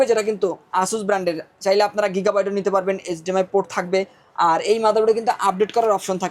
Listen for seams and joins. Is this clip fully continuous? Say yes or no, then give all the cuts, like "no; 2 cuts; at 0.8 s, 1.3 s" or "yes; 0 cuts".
yes; 0 cuts